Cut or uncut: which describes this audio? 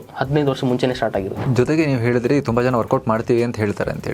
cut